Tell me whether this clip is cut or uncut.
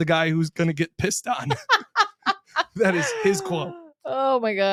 uncut